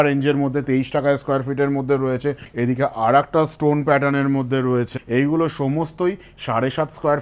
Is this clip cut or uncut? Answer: cut